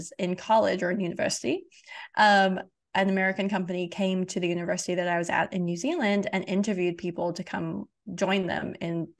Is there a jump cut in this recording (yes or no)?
no